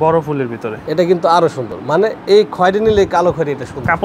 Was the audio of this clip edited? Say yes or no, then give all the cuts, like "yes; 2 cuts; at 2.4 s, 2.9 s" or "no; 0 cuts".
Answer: no; 0 cuts